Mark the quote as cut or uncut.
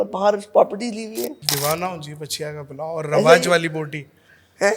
cut